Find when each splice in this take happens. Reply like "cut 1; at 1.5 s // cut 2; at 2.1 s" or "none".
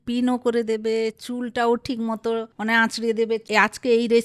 cut 1; at 2.5 s // cut 2; at 3.4 s